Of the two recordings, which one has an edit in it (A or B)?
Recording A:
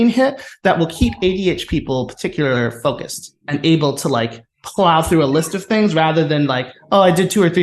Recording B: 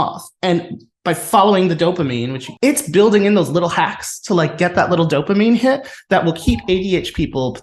B